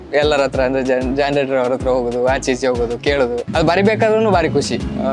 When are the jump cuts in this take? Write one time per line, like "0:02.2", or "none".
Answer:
0:03.5

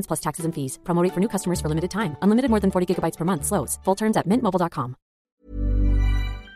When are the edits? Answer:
0:05.2

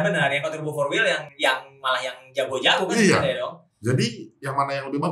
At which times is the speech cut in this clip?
0:01.3
0:03.7

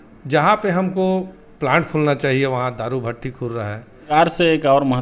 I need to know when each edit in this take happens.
0:04.1

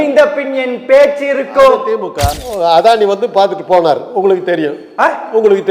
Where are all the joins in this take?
0:02.3

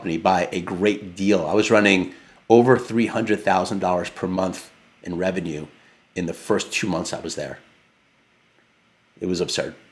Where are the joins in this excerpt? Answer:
none

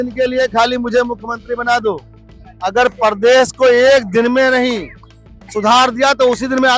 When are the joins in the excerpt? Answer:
none

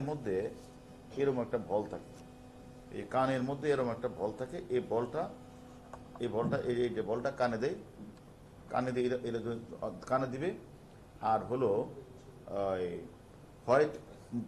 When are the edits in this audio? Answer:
0:02.8

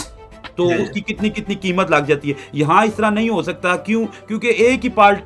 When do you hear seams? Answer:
none

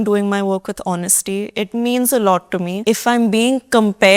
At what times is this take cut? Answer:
0:02.8

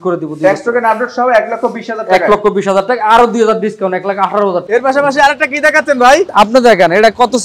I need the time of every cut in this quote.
0:04.6
0:06.3

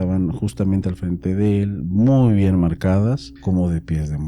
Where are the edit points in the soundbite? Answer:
0:03.3

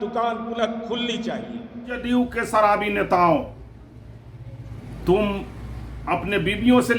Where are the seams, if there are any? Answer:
0:02.0

